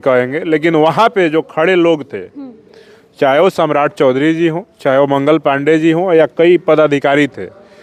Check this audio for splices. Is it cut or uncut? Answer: uncut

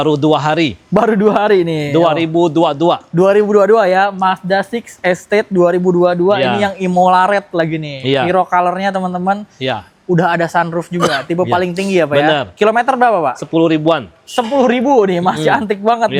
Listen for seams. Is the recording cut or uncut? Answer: uncut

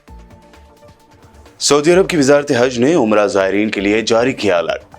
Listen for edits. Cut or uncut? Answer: cut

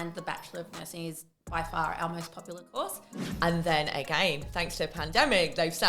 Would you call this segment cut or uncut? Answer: cut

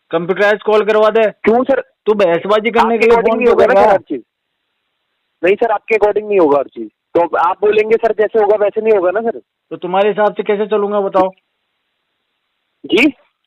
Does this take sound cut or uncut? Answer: uncut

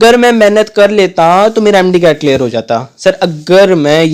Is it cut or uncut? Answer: uncut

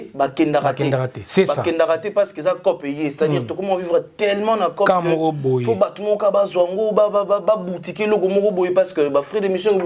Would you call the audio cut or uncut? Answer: uncut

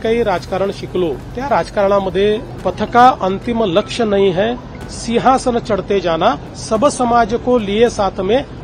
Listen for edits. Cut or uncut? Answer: cut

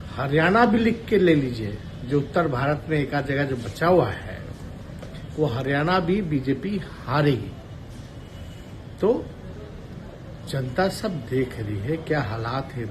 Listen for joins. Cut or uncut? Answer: uncut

